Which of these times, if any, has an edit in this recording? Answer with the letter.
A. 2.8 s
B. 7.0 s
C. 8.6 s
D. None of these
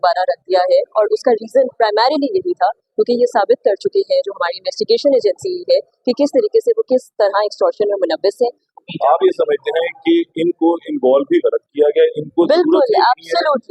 C